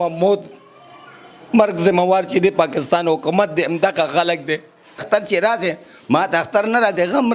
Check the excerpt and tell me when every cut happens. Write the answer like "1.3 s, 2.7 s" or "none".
5.0 s